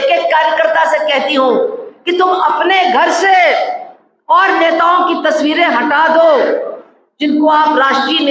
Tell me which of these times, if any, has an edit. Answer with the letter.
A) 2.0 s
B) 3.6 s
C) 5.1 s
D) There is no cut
D